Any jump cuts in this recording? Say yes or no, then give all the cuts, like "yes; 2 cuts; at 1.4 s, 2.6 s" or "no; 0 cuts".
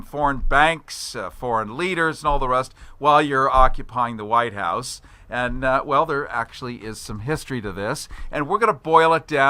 no; 0 cuts